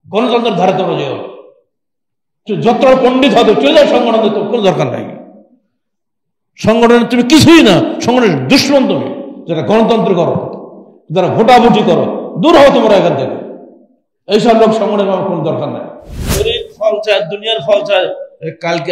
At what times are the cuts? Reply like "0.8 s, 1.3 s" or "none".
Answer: 16.3 s